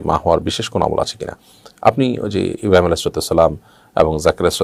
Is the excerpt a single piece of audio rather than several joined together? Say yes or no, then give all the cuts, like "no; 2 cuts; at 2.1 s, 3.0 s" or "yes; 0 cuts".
yes; 0 cuts